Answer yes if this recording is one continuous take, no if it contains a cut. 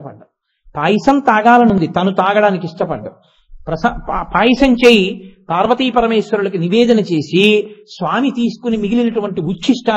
yes